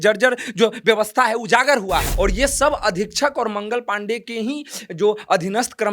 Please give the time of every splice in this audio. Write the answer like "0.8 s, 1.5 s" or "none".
2.1 s